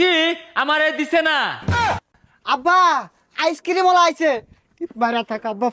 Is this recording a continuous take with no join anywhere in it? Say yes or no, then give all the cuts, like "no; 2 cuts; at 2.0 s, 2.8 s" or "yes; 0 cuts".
no; 1 cut; at 1.8 s